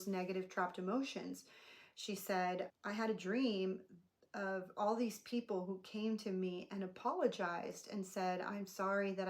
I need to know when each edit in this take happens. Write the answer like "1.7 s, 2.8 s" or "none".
2.7 s